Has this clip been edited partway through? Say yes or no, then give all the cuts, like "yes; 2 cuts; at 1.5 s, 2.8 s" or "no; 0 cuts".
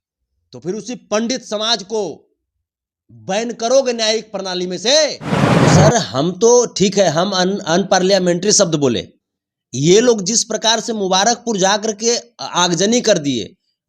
yes; 1 cut; at 5.6 s